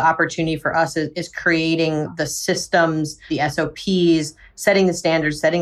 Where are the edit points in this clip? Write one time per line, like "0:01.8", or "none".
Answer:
0:03.2